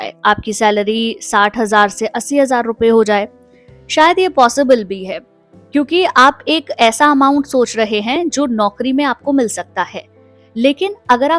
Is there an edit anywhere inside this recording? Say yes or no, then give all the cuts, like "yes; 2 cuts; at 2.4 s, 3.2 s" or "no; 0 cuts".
no; 0 cuts